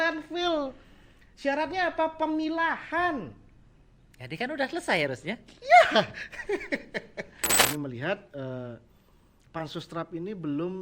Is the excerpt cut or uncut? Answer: cut